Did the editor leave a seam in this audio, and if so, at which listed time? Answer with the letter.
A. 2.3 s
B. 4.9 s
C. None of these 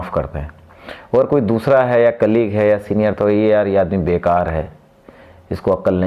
C